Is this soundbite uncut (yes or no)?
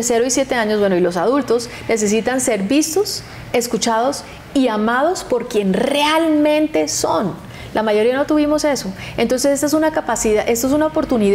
yes